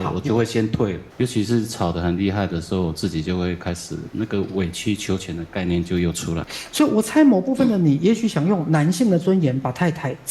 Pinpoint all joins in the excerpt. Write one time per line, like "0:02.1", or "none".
0:01.1
0:06.6